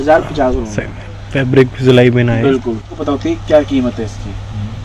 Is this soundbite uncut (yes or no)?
no